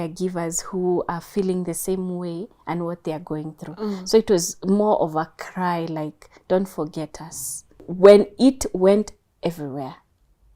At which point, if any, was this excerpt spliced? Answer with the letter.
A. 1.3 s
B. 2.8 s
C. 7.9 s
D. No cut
C